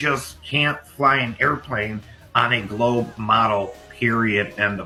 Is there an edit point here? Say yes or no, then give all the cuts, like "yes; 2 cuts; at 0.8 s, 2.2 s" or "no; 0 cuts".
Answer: no; 0 cuts